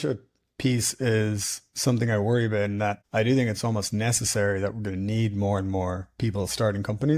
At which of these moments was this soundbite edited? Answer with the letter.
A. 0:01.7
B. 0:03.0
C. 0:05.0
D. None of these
B